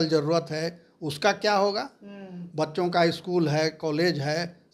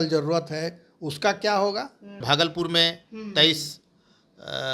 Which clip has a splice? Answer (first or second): second